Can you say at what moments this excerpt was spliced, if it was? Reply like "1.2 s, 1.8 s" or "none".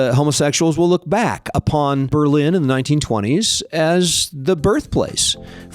2.1 s